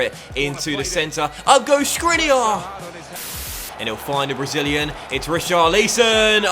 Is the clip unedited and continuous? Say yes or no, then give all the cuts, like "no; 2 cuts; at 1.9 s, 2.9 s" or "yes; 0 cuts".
no; 1 cut; at 3.4 s